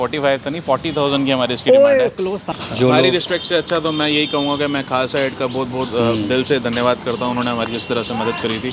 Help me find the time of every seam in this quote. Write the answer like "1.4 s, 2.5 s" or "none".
2.5 s